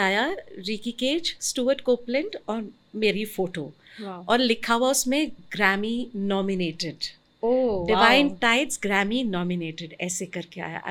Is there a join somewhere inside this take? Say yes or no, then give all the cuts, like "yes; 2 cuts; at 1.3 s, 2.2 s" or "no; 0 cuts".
no; 0 cuts